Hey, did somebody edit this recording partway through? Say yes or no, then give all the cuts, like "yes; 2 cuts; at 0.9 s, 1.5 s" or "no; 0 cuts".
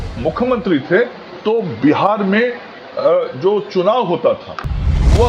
no; 0 cuts